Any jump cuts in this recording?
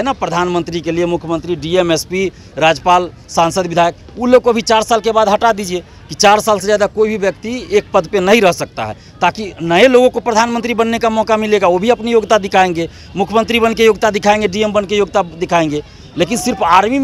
no; 0 cuts

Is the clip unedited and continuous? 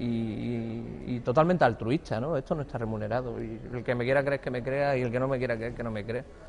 yes; 0 cuts

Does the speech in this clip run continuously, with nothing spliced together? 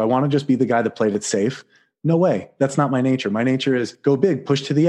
no; 1 cut; at 3.9 s

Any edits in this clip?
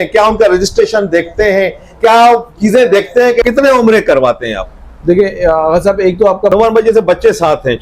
yes; 2 cuts; at 3.4 s, 6.5 s

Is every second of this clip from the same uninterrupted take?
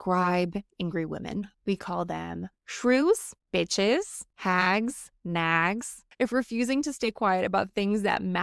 no; 5 cuts; at 1.5 s, 3.4 s, 4.2 s, 5.1 s, 6.0 s

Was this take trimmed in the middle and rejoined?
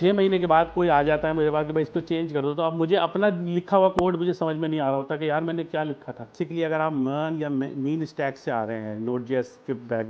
yes; 1 cut; at 6.3 s

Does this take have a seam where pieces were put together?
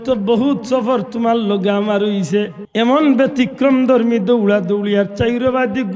yes; 1 cut; at 2.6 s

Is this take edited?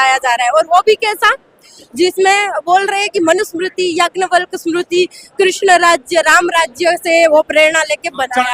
no; 0 cuts

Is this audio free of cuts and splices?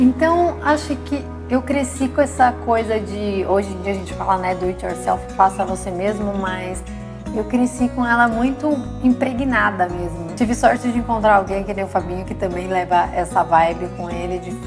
yes; 0 cuts

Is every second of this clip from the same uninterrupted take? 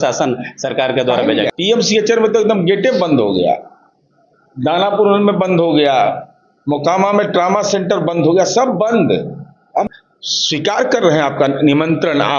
no; 2 cuts; at 1.5 s, 9.9 s

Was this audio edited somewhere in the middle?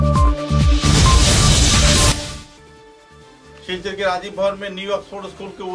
no; 0 cuts

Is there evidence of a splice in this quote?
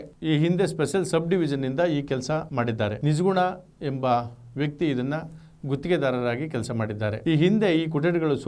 no; 0 cuts

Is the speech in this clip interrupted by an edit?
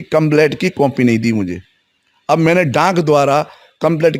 no; 0 cuts

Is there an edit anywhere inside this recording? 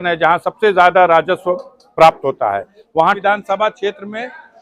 yes; 1 cut; at 3.2 s

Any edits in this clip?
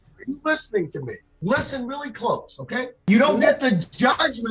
yes; 1 cut; at 3.0 s

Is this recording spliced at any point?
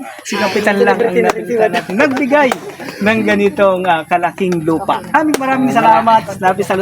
yes; 1 cut; at 5.1 s

